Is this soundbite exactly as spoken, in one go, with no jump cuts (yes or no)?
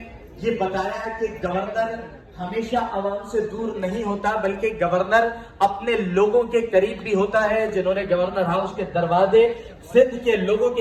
yes